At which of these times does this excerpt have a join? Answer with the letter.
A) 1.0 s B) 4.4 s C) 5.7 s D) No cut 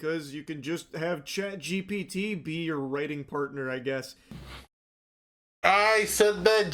B